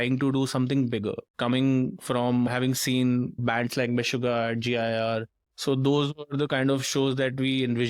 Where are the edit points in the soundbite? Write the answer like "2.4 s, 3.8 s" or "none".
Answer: 1.3 s